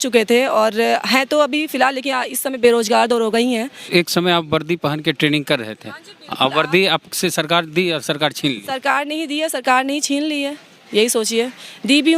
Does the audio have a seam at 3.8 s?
yes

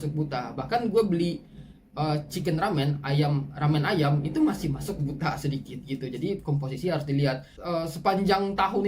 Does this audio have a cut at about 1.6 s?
no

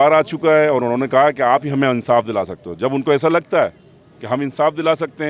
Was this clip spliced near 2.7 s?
no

